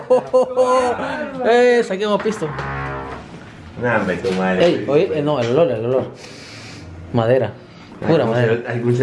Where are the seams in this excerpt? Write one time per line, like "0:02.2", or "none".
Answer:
none